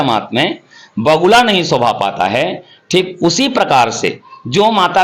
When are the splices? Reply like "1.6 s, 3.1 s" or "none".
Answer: none